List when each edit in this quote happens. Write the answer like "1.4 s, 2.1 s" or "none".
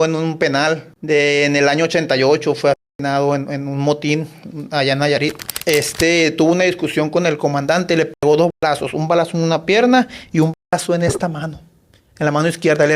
0.9 s, 5.5 s